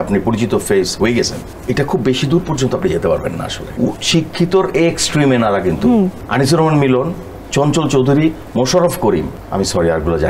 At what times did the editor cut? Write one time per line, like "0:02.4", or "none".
0:01.5
0:03.6
0:06.2
0:09.4